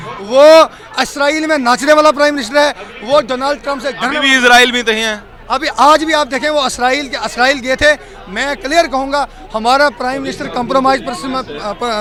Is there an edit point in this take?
no; 0 cuts

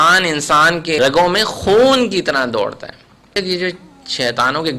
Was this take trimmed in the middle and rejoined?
yes; 2 cuts; at 1.0 s, 3.4 s

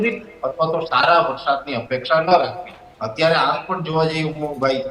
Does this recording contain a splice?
no; 0 cuts

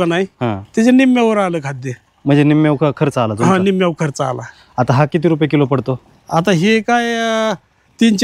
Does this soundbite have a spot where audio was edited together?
no; 0 cuts

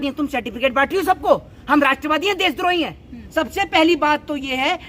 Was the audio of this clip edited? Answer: yes; 1 cut; at 3.2 s

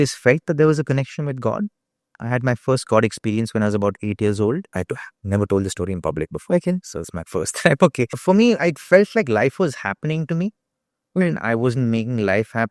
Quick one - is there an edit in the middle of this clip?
yes; 2 cuts; at 4.8 s, 8.1 s

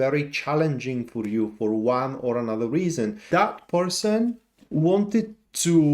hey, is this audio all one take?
no; 2 cuts; at 3.2 s, 4.5 s

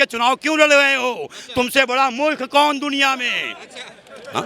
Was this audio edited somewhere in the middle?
no; 0 cuts

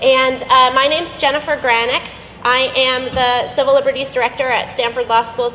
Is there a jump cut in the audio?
no; 0 cuts

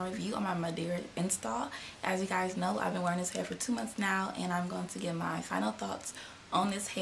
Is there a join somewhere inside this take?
yes; 1 cut; at 4.1 s

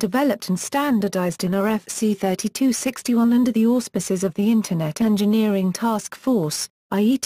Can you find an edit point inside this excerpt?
yes; 1 cut; at 1.9 s

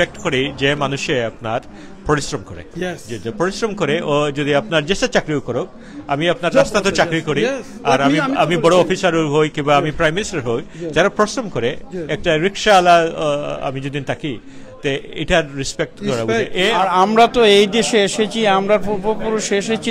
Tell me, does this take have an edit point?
yes; 1 cut; at 16.7 s

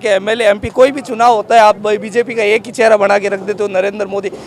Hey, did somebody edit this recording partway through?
no; 0 cuts

